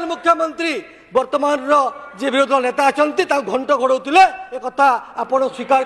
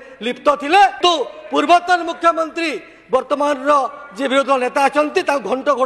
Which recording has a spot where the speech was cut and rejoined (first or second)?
second